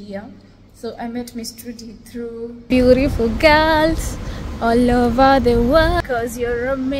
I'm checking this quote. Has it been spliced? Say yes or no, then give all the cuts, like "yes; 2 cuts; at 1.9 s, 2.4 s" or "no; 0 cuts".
yes; 1 cut; at 2.7 s